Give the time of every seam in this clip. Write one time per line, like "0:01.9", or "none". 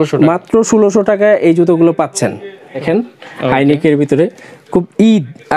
0:02.8